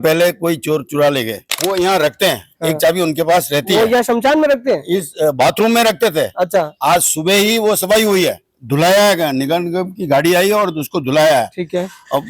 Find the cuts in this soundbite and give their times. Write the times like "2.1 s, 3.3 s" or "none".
1.5 s